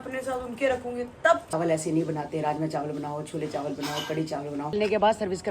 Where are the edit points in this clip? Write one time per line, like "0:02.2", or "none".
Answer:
0:01.5
0:04.7

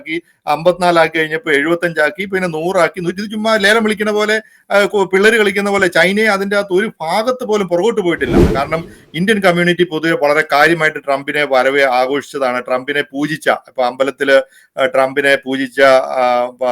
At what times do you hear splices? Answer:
0:08.5

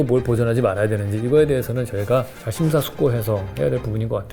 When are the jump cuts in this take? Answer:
none

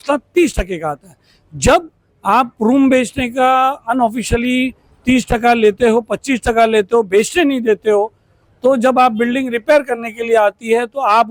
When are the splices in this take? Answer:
none

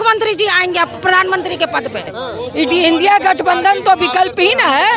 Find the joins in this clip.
0:02.1

